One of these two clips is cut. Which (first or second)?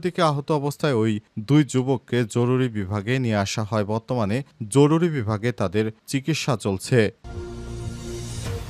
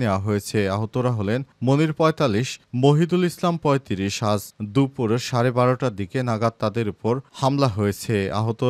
first